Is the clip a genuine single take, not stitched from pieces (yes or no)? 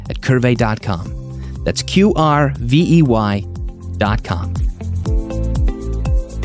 no